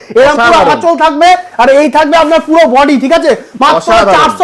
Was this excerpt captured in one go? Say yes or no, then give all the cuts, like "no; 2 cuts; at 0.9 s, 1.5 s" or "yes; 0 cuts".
yes; 0 cuts